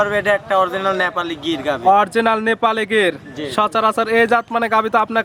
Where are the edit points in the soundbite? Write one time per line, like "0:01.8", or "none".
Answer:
none